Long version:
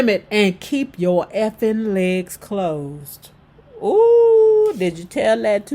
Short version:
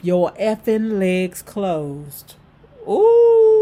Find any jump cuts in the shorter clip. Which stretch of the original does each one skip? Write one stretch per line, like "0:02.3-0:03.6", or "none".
none